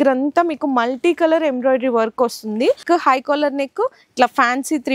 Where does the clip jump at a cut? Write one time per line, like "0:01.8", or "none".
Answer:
0:02.8